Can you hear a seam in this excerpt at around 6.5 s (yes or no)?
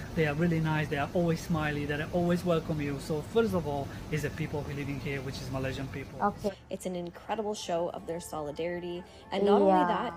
yes